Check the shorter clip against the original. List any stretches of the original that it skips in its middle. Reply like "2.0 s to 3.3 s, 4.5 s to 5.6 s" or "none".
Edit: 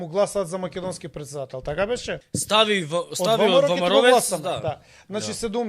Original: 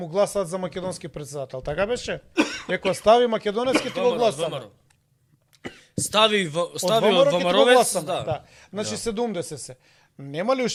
2.2 s to 5.9 s